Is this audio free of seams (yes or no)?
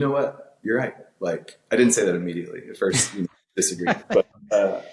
yes